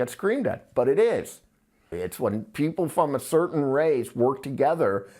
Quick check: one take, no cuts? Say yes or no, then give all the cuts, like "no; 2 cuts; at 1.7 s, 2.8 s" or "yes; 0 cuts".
no; 1 cut; at 1.9 s